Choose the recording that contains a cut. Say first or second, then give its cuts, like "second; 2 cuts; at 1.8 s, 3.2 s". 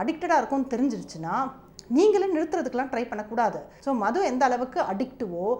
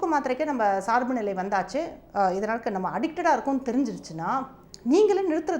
first; 1 cut; at 3.7 s